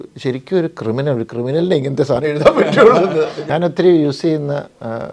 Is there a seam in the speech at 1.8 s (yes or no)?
no